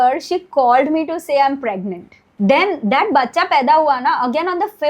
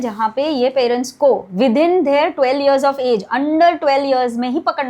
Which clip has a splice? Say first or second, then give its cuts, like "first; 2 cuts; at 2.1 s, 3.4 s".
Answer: first; 1 cut; at 2.2 s